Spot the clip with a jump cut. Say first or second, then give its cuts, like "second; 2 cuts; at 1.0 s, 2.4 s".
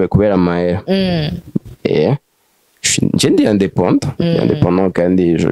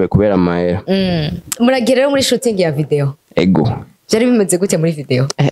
second; 1 cut; at 1.5 s